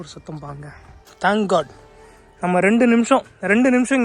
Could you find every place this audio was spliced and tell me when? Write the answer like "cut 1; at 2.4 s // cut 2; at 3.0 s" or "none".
cut 1; at 1.0 s